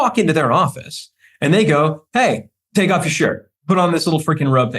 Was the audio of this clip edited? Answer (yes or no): yes